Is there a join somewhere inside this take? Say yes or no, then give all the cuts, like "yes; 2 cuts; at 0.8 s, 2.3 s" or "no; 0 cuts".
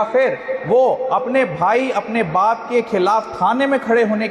no; 0 cuts